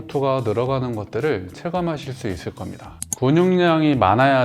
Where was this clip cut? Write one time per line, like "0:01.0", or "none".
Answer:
0:02.9